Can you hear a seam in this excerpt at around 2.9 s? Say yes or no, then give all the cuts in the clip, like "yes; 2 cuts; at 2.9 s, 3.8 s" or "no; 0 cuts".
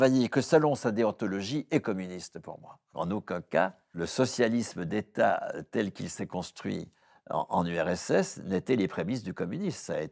yes; 2 cuts; at 2.9 s, 3.9 s